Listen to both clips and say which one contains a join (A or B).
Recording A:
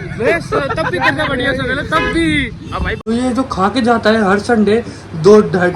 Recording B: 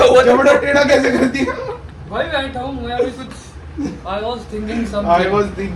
A